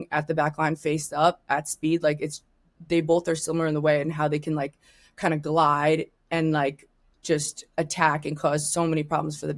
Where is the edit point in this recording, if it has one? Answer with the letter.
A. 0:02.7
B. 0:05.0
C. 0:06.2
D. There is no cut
D